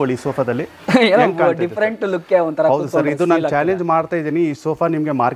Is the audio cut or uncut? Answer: uncut